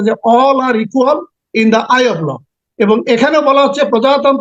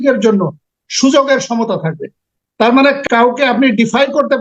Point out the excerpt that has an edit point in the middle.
second; 1 cut; at 3.0 s

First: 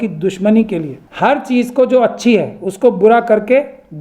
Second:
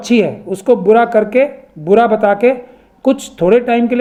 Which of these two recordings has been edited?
first; 1 cut; at 1.0 s

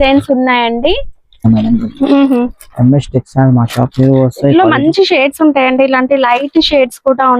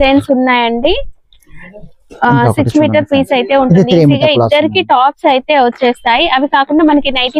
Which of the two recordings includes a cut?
first; 1 cut; at 1.4 s

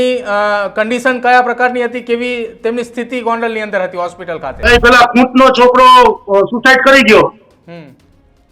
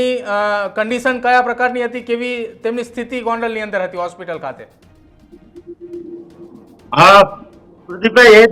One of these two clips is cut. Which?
first; 1 cut; at 4.5 s

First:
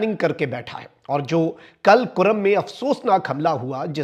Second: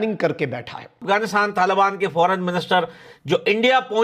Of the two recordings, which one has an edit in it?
second; 1 cut; at 1.0 s

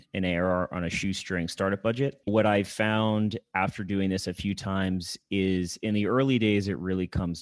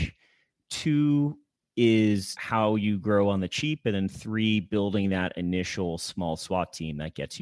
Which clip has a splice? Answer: first; 1 cut; at 2.2 s

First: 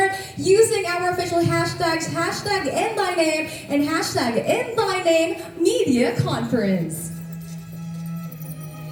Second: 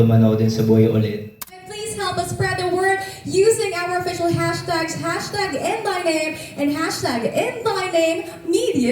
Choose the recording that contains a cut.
second; 1 cut; at 1.6 s

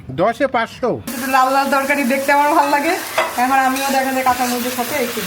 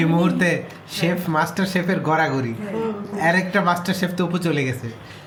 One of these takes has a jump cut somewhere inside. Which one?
first; 1 cut; at 1.1 s

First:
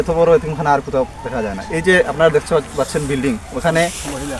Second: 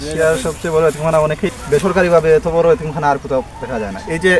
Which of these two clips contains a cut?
second; 1 cut; at 1.5 s

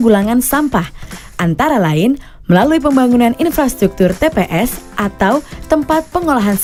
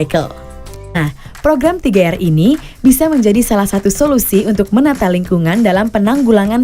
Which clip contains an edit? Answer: second; 1 cut; at 1.0 s

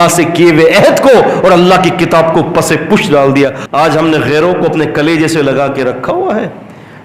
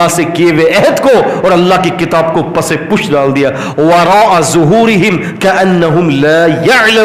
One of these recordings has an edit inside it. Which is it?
first; 1 cut; at 3.6 s

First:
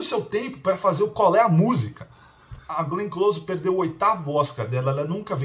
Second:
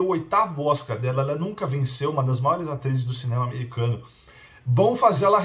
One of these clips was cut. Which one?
first; 1 cut; at 2.7 s

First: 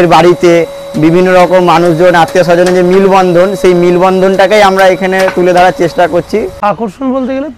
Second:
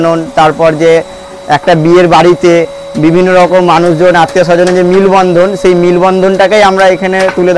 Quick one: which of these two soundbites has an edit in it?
first; 1 cut; at 6.5 s

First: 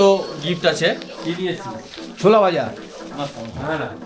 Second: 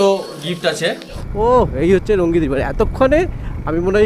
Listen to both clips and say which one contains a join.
second; 1 cut; at 1.1 s

